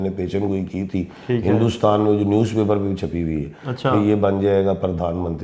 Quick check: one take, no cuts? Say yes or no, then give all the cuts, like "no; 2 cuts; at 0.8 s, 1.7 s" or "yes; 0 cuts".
yes; 0 cuts